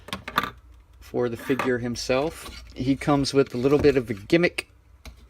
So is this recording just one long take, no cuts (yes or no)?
no